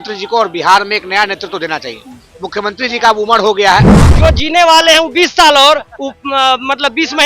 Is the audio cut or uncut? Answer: cut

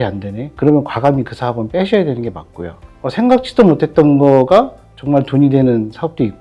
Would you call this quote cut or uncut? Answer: uncut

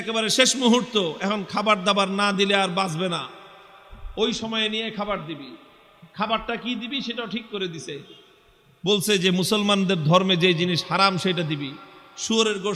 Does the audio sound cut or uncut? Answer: uncut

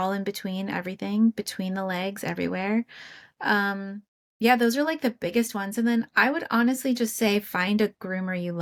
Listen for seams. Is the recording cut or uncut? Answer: uncut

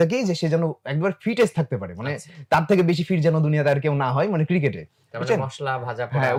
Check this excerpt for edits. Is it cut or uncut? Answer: uncut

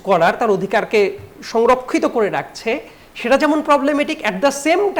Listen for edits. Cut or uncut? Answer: uncut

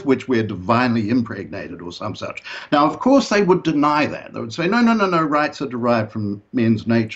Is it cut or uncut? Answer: uncut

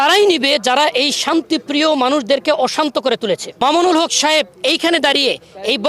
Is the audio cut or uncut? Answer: cut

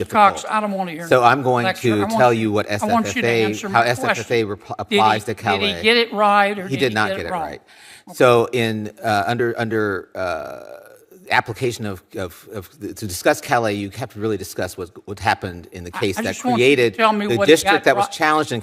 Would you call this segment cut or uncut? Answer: uncut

